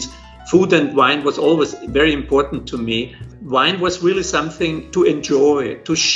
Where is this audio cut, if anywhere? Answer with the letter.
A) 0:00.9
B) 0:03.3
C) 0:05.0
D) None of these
B